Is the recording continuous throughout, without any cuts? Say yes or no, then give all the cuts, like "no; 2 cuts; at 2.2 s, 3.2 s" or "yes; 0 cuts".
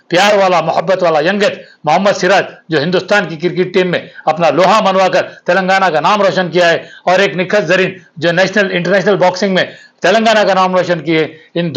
yes; 0 cuts